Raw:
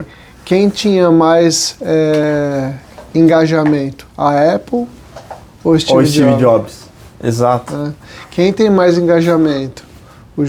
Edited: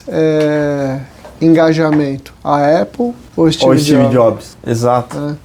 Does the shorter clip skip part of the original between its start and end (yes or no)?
yes